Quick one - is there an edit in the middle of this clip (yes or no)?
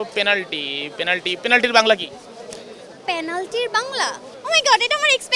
yes